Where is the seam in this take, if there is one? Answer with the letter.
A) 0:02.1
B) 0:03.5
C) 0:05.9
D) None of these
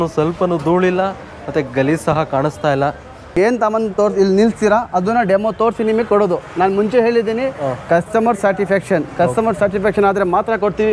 B